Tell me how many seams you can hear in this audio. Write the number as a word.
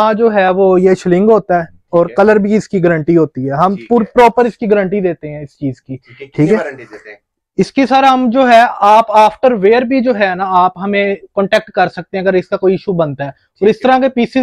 zero